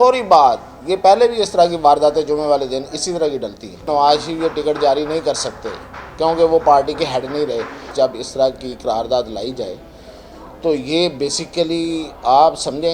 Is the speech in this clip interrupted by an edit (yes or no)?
yes